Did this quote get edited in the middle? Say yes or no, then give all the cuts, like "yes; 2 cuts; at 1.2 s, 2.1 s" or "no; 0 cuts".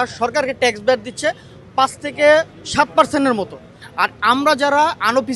no; 0 cuts